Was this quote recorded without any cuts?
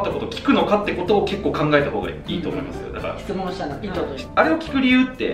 yes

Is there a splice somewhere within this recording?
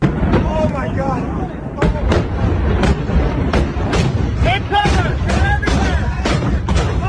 no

